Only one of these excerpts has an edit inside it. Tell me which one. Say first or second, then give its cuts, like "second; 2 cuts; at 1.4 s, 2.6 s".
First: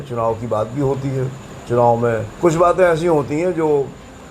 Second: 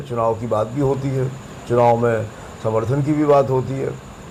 first; 1 cut; at 2.3 s